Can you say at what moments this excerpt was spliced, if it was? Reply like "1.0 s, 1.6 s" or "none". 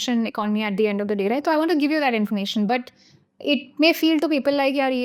none